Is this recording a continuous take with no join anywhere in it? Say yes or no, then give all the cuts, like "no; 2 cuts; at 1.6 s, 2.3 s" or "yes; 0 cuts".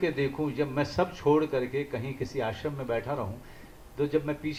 yes; 0 cuts